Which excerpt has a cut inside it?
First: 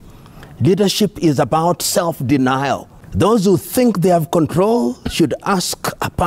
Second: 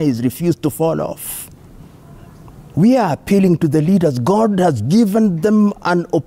first; 1 cut; at 3.0 s

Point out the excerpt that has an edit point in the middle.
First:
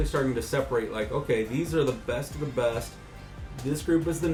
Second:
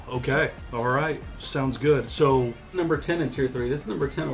second; 1 cut; at 2.7 s

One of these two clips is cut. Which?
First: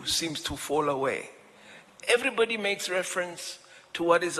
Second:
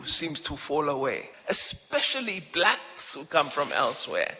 second; 1 cut; at 1.3 s

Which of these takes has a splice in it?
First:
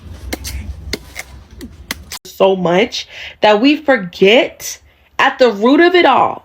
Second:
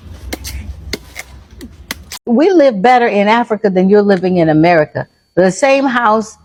first; 1 cut; at 2.3 s

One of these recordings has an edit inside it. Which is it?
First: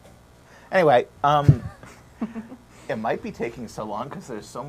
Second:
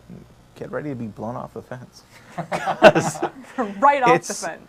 first; 1 cut; at 3.6 s

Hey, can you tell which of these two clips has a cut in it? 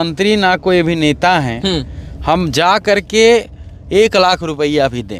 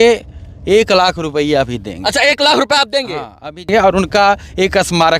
second; 1 cut; at 3.7 s

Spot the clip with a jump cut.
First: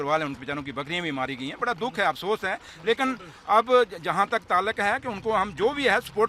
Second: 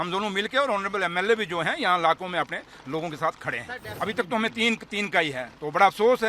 second; 1 cut; at 3.9 s

